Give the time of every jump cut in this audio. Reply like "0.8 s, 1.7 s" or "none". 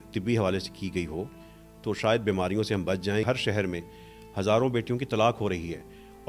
3.2 s